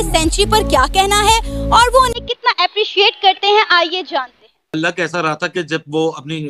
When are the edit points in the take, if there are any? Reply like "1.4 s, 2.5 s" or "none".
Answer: 4.7 s